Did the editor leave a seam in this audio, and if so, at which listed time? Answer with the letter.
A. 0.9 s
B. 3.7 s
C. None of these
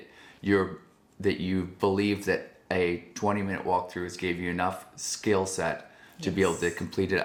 C